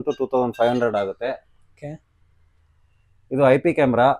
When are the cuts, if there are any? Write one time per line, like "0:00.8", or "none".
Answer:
none